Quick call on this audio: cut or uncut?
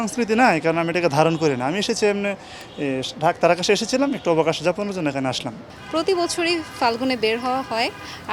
cut